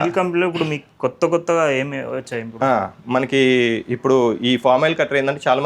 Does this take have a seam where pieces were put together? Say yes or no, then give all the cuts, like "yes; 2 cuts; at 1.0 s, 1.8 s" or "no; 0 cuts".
no; 0 cuts